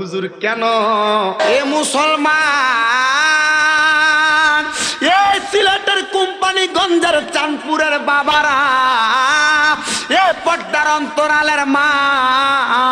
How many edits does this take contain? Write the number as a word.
one